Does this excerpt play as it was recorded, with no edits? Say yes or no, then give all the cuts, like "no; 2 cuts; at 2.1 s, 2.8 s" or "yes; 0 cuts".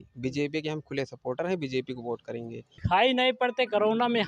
no; 1 cut; at 2.8 s